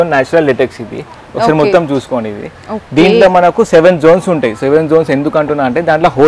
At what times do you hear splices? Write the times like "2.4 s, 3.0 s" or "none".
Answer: none